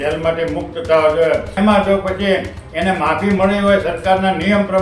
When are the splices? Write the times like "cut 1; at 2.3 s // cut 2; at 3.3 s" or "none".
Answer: cut 1; at 1.5 s